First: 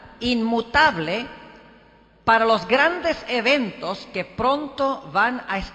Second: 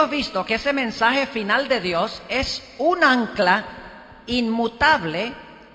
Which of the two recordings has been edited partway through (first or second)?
first